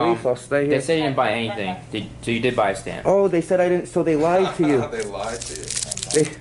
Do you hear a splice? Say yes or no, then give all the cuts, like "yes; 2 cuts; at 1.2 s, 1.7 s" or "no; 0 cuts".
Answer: no; 0 cuts